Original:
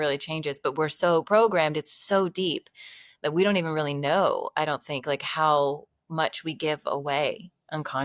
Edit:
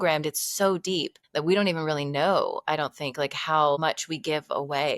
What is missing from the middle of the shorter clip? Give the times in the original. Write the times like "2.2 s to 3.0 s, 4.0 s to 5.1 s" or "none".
2.7 s to 3.1 s, 5.7 s to 6.1 s